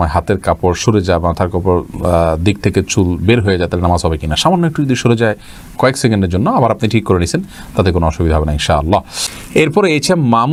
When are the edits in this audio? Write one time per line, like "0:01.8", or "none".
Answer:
none